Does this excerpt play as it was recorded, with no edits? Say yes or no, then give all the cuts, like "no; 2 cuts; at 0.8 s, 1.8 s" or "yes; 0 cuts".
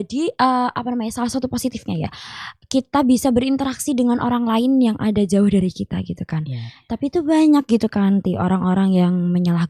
yes; 0 cuts